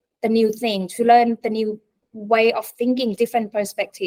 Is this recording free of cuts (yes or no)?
yes